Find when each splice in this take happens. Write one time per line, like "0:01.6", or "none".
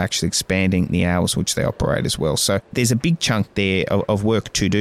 0:02.7

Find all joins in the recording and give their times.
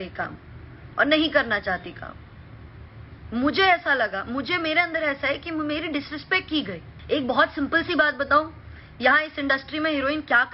none

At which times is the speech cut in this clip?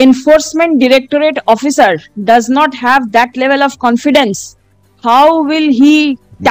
none

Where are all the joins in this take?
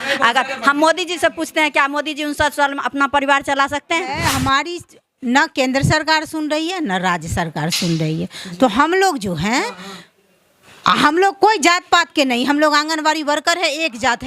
0:04.2

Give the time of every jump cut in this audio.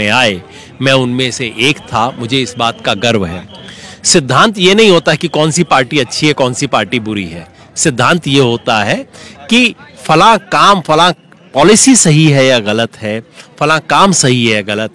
none

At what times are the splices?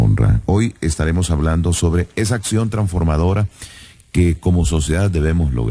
0:02.4

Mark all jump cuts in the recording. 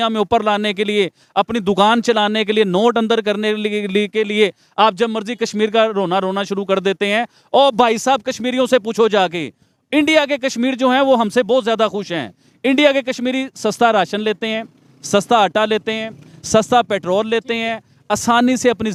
none

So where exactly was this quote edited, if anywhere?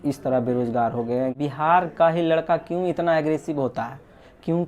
0:01.3

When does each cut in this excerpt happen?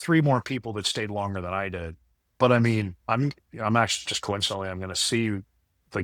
0:03.0

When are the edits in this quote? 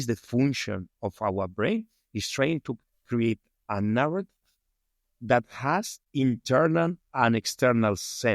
0:06.0

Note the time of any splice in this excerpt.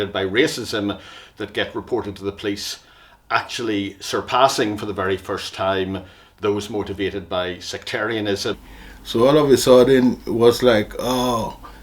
0:08.7

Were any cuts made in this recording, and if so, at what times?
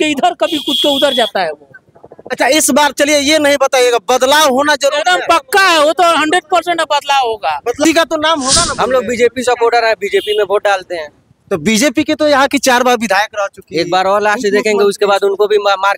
0:07.8

